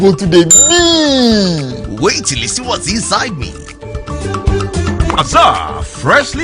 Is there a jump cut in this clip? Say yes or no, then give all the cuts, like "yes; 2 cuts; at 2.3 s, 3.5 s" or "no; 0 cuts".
yes; 1 cut; at 5.1 s